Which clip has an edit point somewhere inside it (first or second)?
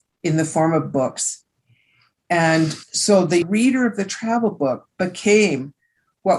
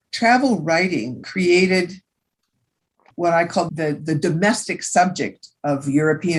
first